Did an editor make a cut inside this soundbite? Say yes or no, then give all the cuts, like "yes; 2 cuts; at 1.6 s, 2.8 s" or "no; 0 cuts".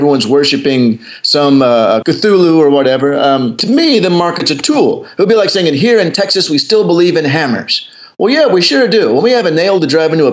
yes; 1 cut; at 3.6 s